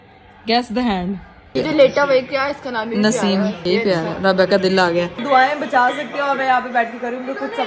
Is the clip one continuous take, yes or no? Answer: no